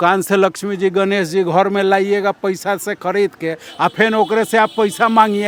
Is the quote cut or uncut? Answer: uncut